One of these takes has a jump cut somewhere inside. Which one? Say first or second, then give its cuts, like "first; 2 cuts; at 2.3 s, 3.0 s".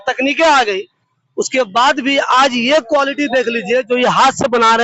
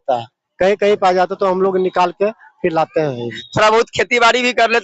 second; 1 cut; at 3.4 s